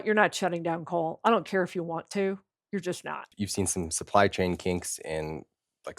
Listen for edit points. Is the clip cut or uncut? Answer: cut